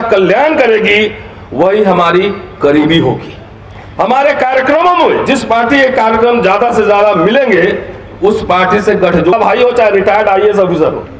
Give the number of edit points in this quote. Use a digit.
1